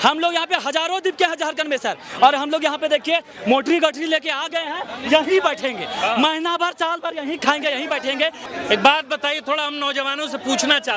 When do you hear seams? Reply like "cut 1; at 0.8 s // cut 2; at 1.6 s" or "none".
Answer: cut 1; at 8.4 s